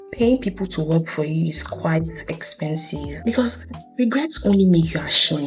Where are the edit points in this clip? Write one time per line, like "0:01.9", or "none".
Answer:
0:03.1